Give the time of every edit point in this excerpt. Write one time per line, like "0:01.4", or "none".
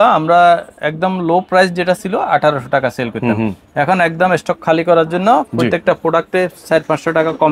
none